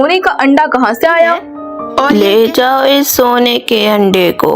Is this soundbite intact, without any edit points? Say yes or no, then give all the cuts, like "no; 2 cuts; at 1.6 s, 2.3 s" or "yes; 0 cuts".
no; 1 cut; at 2.1 s